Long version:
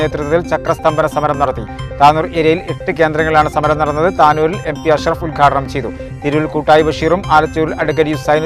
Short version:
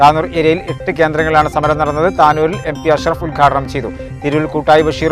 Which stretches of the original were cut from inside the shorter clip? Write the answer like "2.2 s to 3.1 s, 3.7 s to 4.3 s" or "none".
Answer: none